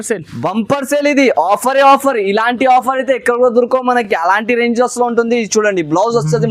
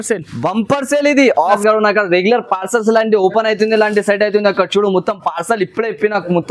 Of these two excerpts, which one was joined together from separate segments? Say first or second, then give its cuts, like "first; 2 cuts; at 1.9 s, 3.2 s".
second; 1 cut; at 1.6 s